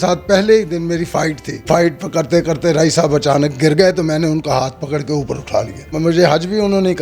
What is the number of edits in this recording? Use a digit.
2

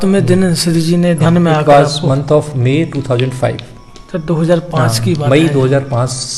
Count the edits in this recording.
1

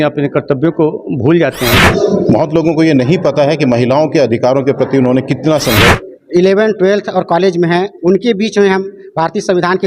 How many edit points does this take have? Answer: 2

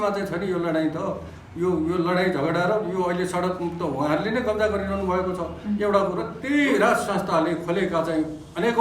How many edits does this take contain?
1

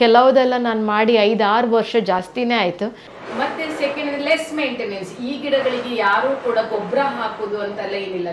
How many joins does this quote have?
1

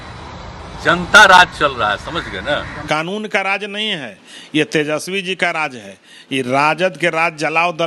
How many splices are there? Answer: 1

